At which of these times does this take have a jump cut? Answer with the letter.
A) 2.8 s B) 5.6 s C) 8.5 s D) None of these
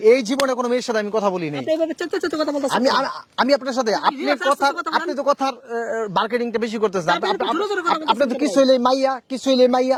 D